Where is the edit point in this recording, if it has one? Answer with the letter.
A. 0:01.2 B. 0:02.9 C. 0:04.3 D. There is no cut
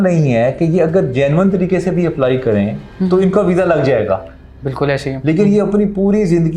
D